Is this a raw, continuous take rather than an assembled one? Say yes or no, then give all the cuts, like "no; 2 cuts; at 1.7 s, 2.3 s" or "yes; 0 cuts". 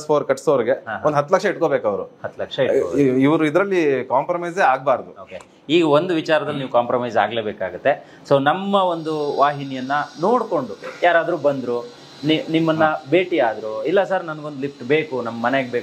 yes; 0 cuts